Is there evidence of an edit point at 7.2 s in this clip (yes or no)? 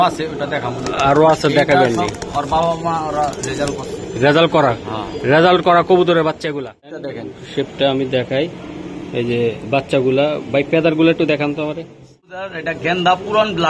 yes